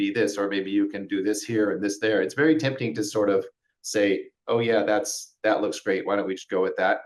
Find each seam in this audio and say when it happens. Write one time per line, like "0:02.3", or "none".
none